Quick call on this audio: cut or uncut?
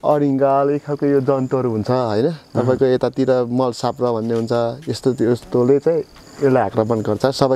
uncut